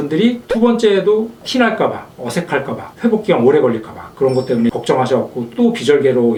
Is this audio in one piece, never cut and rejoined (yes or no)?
yes